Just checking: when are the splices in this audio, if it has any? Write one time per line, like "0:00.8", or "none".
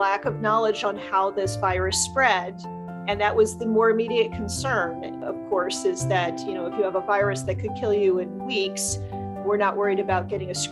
none

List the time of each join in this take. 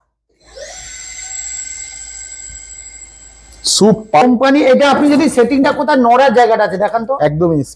0:04.2

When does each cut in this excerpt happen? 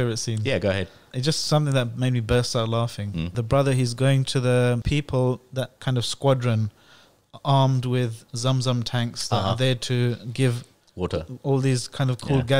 0:01.1
0:03.4
0:04.8
0:05.8

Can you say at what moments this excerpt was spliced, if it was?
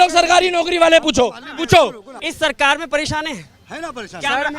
0:02.1

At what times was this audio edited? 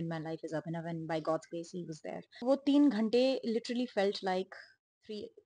0:02.4

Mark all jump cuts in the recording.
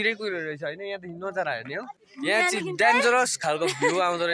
0:02.0

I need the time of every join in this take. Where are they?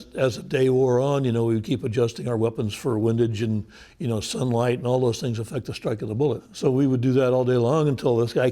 0:06.4

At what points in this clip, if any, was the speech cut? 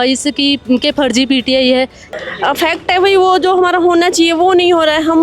0:02.0

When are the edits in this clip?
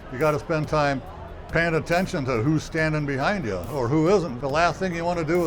0:04.4

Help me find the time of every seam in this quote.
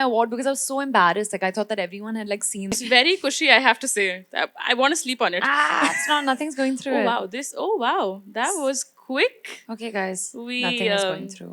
0:02.8

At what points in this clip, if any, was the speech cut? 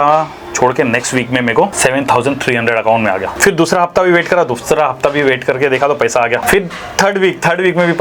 0:01.7
0:03.3
0:06.4

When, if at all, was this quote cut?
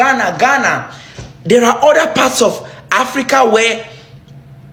none

